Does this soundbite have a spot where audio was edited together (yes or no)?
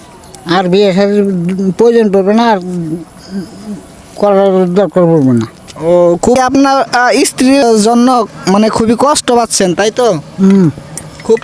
yes